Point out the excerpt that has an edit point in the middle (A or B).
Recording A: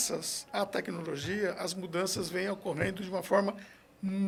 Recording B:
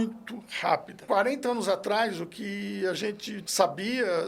B